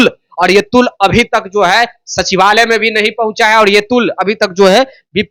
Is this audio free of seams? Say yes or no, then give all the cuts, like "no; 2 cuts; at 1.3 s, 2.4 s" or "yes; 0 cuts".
yes; 0 cuts